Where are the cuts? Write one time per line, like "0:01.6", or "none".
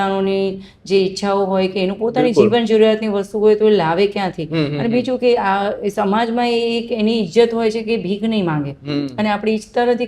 none